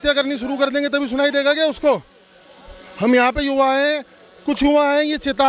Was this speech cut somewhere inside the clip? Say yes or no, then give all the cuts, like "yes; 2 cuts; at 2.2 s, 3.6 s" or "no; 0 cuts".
no; 0 cuts